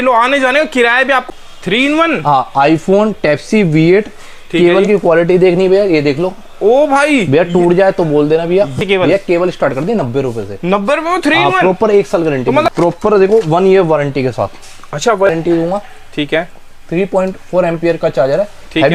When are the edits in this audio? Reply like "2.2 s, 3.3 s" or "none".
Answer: 1.2 s, 8.8 s, 12.6 s, 15.3 s